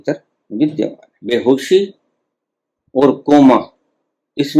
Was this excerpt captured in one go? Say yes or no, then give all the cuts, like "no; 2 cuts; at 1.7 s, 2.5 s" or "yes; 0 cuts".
no; 1 cut; at 1.1 s